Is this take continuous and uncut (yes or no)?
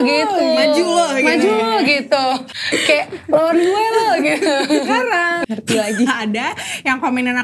no